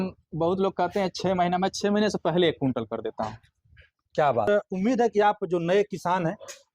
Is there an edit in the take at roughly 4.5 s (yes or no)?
yes